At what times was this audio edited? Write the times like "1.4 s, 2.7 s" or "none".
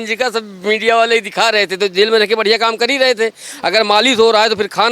none